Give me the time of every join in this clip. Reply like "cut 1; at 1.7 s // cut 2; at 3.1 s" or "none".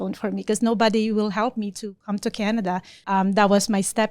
cut 1; at 2.9 s